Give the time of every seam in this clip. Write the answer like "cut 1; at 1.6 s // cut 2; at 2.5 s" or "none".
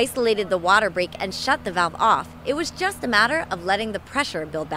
none